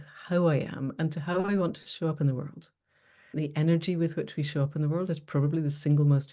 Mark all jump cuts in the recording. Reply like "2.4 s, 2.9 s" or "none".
3.4 s